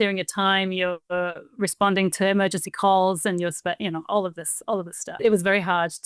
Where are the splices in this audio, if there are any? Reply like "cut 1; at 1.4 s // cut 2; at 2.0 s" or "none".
cut 1; at 5.2 s